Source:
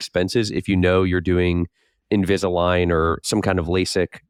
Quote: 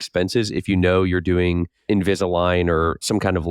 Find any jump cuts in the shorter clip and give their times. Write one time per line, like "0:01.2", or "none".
0:01.7